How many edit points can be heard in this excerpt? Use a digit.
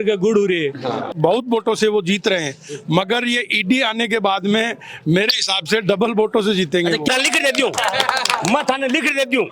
2